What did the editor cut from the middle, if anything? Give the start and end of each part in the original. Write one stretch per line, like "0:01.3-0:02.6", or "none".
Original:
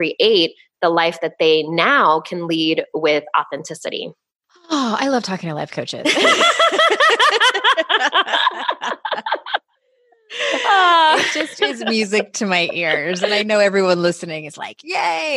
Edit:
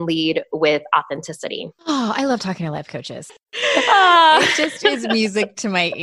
0:04.1-0:04.5
0:05.8-0:09.8

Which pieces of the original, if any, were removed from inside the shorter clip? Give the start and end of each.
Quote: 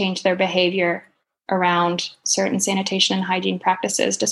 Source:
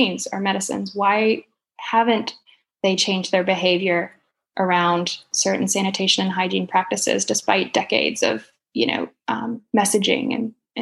none

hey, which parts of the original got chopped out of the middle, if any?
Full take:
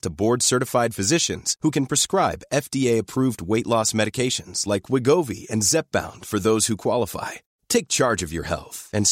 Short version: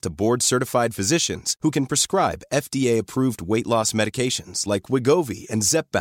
none

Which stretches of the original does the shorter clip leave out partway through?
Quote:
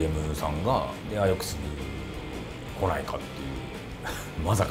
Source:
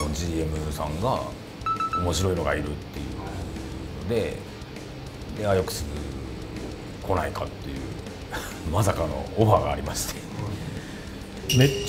0:01.4-0:05.3

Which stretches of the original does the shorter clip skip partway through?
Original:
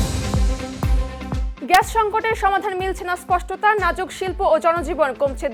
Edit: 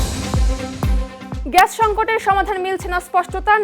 0:01.4-0:01.5

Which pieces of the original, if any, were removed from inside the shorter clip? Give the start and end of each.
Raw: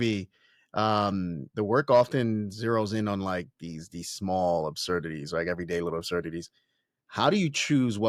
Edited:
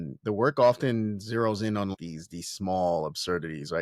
0:03.2-0:03.5

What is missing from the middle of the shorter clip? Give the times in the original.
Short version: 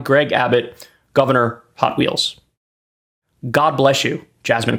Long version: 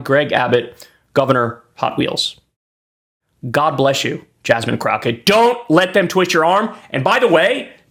none

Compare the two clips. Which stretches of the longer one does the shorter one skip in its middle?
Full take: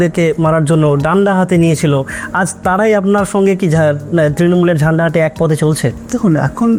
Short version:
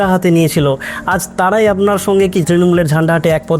0:03.7-0:04.4

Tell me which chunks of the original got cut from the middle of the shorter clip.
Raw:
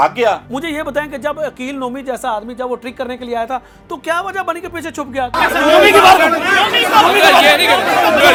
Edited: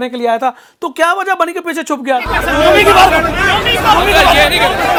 none

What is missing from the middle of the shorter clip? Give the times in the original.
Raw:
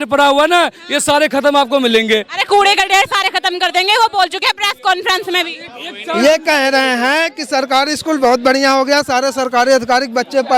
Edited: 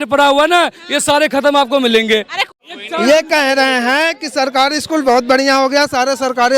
0:02.4-0:05.5

